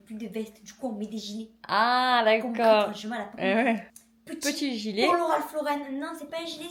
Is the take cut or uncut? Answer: uncut